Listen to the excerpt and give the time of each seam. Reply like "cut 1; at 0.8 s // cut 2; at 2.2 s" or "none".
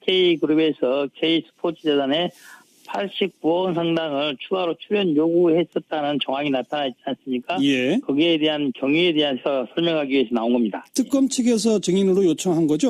cut 1; at 8.7 s